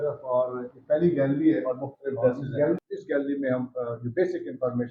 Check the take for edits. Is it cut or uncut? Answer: cut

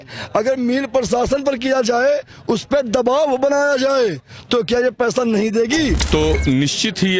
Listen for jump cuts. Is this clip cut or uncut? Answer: cut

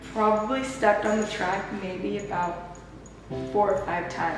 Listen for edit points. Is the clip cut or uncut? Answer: uncut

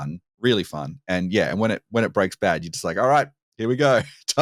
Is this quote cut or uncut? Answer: uncut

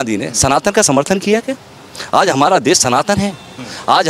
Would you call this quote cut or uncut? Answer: uncut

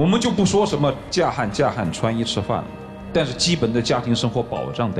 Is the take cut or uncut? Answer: uncut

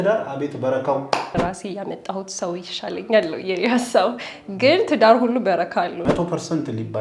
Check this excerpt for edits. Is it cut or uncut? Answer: cut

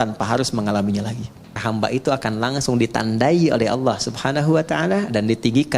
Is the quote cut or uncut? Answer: cut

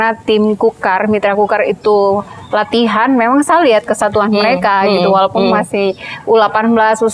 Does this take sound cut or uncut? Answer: uncut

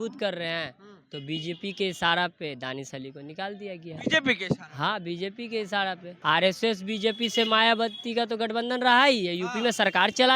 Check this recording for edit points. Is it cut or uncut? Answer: cut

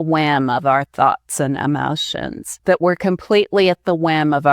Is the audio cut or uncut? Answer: cut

